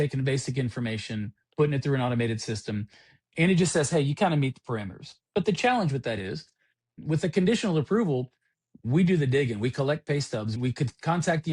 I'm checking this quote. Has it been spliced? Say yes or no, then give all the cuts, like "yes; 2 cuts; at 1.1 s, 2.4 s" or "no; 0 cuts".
yes; 1 cut; at 6.9 s